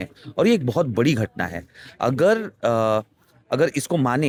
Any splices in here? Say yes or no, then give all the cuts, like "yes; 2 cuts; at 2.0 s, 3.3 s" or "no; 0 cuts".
no; 0 cuts